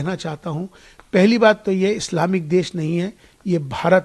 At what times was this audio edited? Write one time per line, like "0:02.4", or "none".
none